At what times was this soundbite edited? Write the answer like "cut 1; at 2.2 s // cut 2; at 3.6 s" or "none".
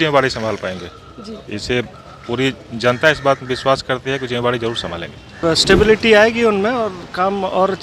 cut 1; at 5.4 s